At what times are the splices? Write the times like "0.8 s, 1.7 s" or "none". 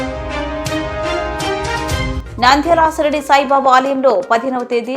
2.2 s